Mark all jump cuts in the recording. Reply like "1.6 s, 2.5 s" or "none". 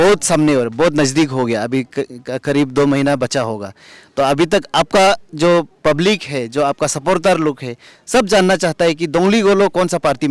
none